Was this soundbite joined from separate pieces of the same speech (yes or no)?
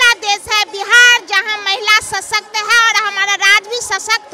no